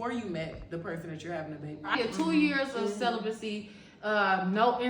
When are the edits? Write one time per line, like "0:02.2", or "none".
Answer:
0:01.9